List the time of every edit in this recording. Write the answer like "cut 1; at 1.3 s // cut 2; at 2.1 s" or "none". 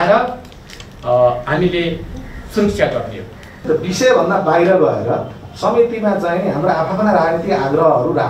cut 1; at 3.6 s